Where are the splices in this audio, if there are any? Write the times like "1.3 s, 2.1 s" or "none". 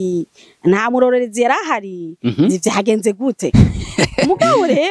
none